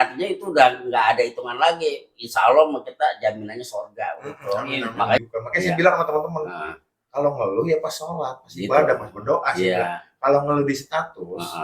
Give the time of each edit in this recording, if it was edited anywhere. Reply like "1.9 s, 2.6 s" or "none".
5.2 s